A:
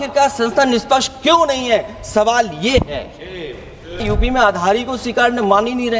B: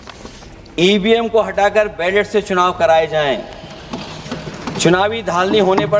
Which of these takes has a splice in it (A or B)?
A